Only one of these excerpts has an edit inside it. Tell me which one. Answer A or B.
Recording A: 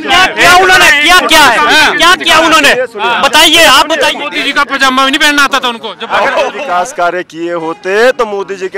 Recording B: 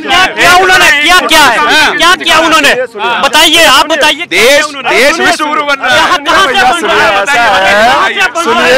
A